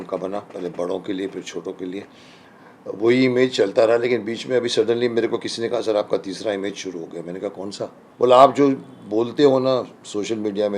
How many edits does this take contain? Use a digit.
1